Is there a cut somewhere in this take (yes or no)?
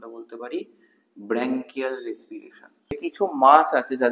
yes